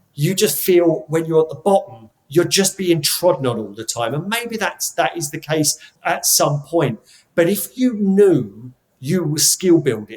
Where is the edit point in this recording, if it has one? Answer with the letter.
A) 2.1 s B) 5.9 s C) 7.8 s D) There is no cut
B